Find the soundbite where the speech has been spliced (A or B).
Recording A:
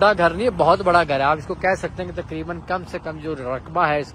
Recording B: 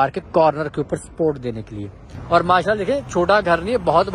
B